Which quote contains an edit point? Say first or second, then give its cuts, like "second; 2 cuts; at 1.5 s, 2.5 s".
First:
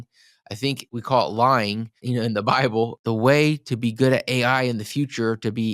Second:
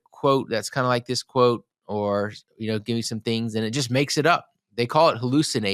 first; 3 cuts; at 0.8 s, 2.0 s, 3.0 s